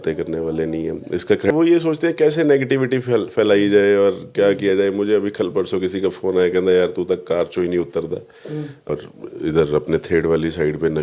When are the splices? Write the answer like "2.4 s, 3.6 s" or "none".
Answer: 1.5 s, 8.9 s

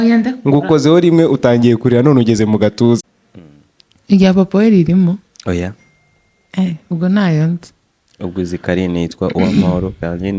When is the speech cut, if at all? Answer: 3.0 s

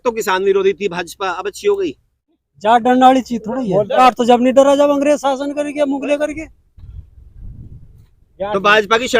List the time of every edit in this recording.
2.4 s, 4.0 s

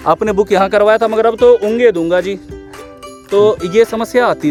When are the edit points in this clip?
none

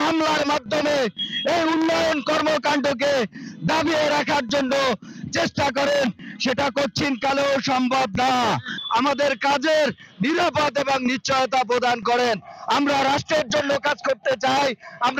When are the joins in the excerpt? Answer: none

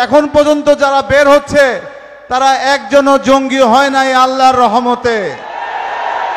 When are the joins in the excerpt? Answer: none

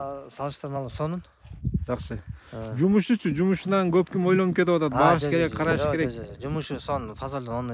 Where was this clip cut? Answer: none

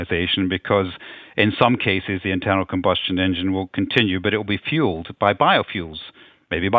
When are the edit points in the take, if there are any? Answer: none

